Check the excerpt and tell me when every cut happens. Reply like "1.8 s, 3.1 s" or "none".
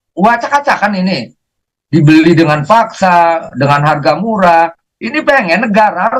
none